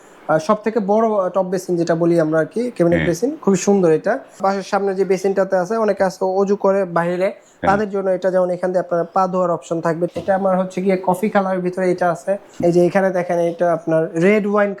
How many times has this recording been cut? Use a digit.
3